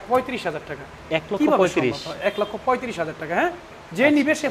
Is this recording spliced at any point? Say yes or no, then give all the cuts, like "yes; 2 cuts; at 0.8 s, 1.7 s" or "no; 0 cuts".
no; 0 cuts